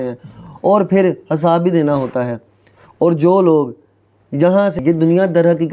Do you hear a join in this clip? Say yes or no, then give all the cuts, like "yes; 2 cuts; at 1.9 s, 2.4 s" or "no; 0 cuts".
yes; 1 cut; at 4.8 s